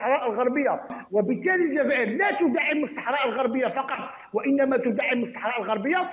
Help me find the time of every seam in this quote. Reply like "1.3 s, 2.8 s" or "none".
1.0 s